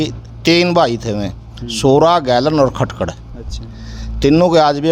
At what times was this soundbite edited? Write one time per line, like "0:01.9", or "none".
none